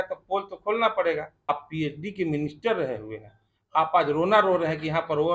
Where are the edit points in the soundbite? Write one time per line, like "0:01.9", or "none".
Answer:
0:01.5